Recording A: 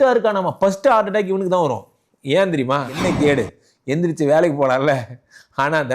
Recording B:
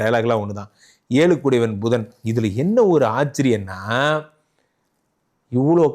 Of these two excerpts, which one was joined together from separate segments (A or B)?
A